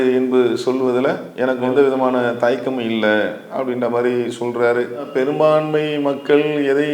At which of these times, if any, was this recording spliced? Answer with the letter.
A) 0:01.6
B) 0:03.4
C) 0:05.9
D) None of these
A